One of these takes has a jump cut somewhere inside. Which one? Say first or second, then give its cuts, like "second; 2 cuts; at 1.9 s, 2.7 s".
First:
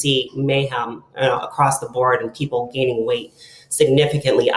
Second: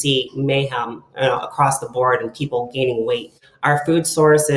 second; 1 cut; at 3.4 s